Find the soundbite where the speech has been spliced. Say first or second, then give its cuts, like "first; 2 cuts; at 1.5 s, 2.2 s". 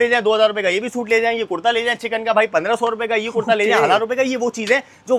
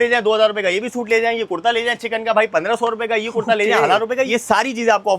second; 1 cut; at 4.3 s